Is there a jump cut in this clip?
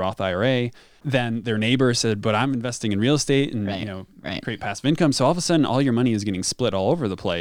yes; 1 cut; at 1.0 s

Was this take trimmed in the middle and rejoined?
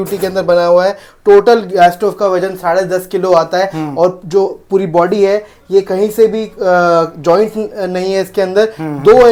no; 0 cuts

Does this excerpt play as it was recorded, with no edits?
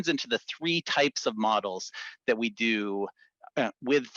yes; 0 cuts

